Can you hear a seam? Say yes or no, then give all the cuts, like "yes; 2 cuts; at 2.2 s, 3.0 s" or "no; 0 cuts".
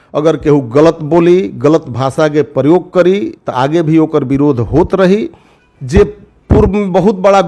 no; 0 cuts